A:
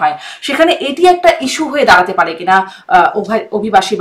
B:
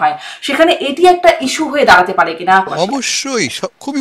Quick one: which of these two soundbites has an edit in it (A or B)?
B